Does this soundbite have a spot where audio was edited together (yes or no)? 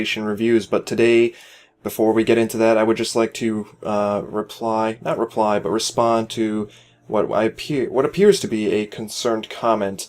yes